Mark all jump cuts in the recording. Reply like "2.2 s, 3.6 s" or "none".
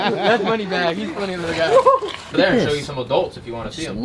2.3 s